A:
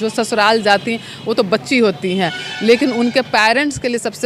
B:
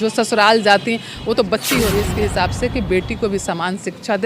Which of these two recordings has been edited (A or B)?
B